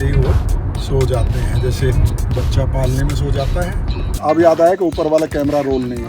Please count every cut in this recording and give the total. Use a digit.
1